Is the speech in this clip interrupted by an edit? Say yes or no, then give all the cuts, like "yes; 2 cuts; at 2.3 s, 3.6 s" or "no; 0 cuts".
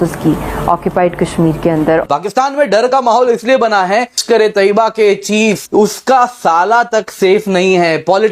yes; 3 cuts; at 2.0 s, 4.2 s, 5.6 s